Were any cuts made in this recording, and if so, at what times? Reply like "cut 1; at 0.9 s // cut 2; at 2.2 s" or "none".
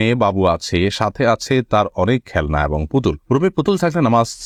none